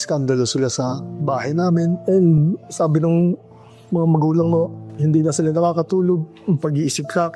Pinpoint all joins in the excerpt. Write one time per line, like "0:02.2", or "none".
0:04.8